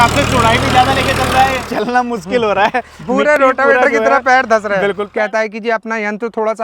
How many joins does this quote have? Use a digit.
2